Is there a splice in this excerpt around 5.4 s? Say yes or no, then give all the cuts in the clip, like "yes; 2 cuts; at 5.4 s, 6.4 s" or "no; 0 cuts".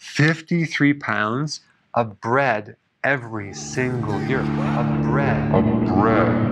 no; 1 cut; at 4.2 s